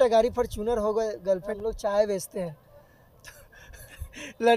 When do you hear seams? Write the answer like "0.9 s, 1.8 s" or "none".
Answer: 1.5 s